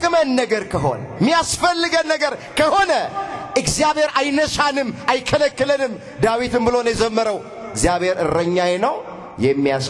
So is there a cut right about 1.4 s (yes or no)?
no